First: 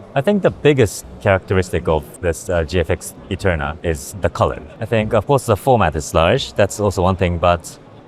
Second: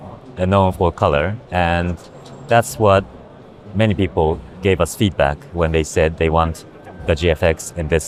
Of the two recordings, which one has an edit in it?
first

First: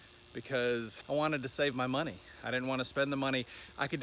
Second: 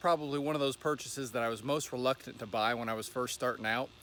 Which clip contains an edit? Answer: first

